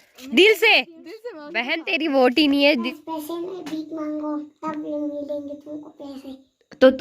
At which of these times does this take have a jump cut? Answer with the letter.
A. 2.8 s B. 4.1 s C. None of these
A